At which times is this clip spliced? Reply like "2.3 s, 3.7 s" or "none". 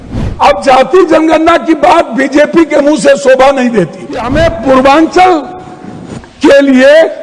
4.3 s

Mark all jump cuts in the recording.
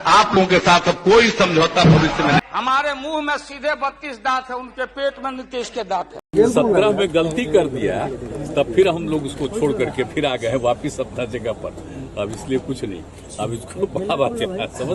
2.4 s, 6.2 s

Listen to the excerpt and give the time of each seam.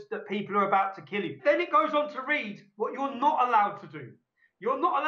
1.4 s

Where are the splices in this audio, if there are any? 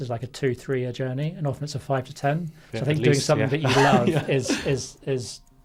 none

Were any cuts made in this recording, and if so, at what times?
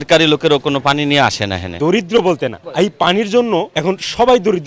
1.6 s, 2.6 s, 3.7 s

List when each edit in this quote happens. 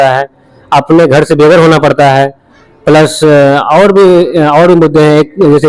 none

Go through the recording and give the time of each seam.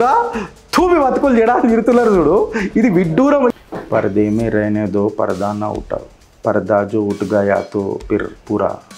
3.5 s

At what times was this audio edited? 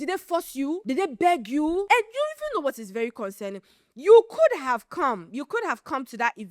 0.8 s, 1.8 s

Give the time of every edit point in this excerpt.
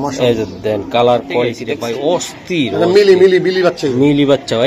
1.7 s

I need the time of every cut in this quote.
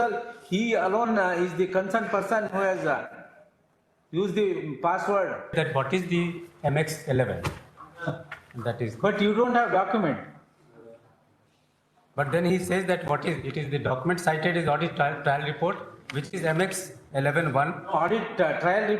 5.5 s

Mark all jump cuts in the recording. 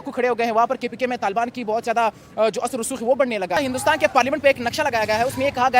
3.6 s

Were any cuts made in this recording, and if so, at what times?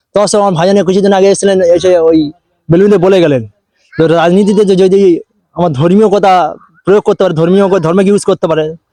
none

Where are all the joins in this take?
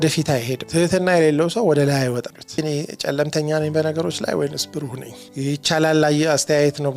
2.3 s

